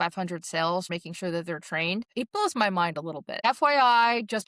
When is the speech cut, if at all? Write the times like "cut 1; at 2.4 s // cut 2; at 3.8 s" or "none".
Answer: cut 1; at 0.9 s // cut 2; at 2.1 s // cut 3; at 3.3 s